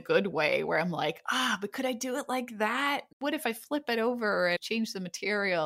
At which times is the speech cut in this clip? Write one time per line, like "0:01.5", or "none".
0:03.1
0:04.6